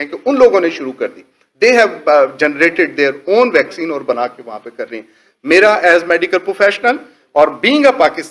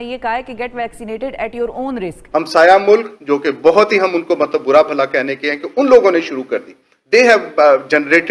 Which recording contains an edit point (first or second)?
second